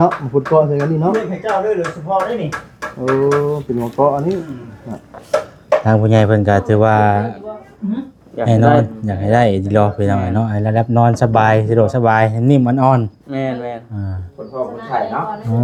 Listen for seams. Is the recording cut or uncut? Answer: uncut